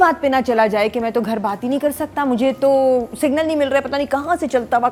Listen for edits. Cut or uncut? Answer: uncut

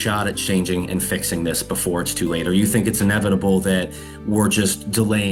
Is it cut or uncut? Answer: uncut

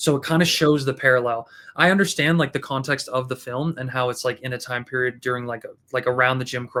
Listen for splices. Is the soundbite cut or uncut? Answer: uncut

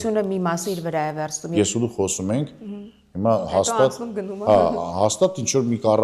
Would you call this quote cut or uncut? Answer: cut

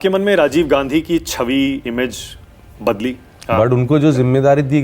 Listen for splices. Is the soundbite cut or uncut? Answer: cut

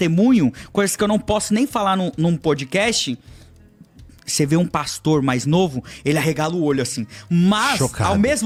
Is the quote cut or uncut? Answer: uncut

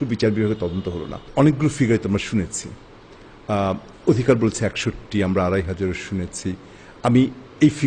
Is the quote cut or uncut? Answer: uncut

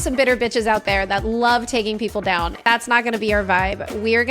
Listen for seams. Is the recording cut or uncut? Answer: cut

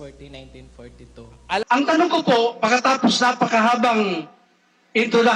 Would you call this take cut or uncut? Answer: cut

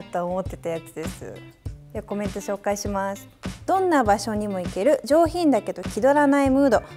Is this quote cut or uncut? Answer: uncut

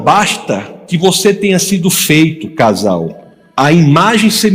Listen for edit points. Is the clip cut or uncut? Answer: uncut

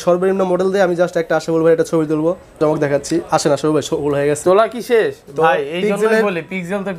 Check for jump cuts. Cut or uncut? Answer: cut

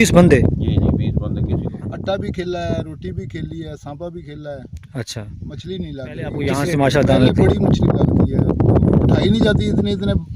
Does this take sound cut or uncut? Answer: cut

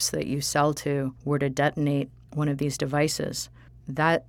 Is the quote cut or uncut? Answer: cut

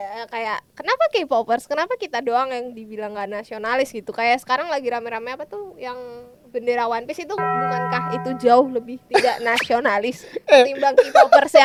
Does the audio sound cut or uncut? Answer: uncut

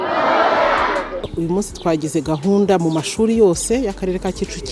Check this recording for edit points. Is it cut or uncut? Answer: cut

